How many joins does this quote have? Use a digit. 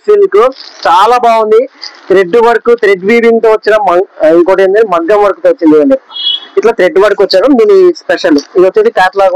1